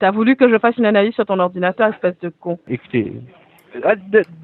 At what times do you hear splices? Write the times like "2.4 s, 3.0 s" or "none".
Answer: 2.6 s